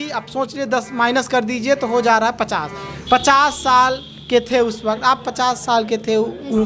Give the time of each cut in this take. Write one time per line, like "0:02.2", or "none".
none

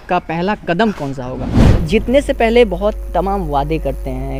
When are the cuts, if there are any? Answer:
0:01.7

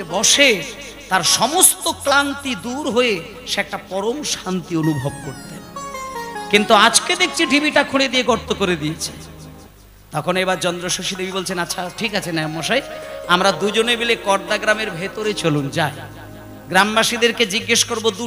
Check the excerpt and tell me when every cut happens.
none

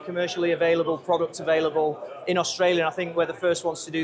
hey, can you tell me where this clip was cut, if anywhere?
none

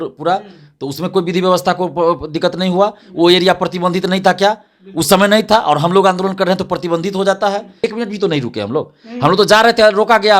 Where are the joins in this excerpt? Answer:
0:07.8

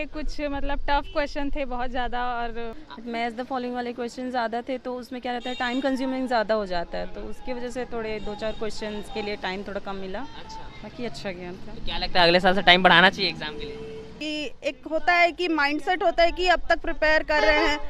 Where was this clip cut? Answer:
0:02.8
0:14.1

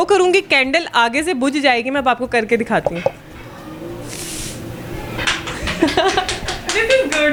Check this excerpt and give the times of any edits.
none

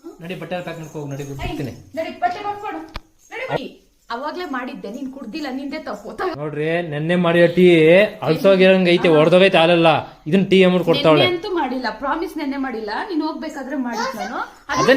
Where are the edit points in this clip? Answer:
0:03.6
0:06.4

